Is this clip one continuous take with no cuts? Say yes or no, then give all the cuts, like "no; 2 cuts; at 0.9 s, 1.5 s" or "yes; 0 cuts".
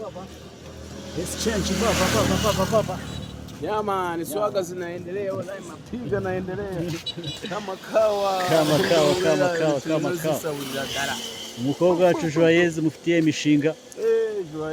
yes; 0 cuts